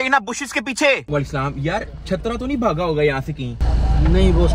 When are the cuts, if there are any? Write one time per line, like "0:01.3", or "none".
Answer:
0:01.0